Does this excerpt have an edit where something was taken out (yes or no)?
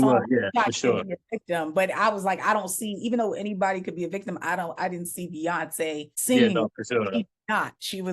yes